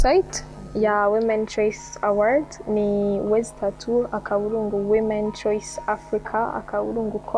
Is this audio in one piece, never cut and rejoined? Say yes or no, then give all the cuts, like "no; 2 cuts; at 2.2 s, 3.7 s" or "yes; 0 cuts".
yes; 0 cuts